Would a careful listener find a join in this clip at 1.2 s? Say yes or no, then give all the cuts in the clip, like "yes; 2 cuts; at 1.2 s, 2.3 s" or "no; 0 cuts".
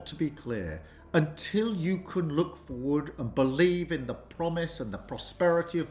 no; 0 cuts